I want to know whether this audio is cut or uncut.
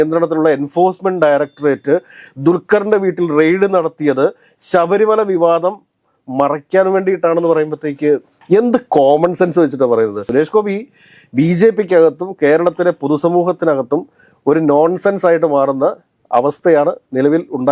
cut